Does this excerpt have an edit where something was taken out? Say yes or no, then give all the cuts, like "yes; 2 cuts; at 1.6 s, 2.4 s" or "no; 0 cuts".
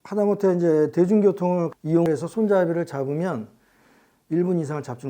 yes; 1 cut; at 1.7 s